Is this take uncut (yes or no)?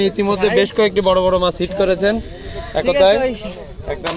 yes